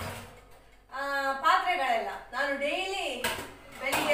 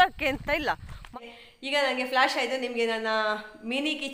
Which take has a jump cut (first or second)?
second